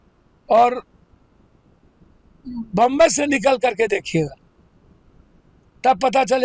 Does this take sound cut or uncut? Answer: uncut